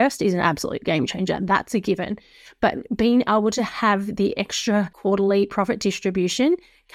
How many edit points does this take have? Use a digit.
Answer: 1